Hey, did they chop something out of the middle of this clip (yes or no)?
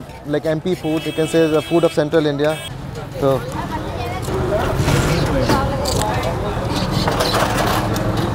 no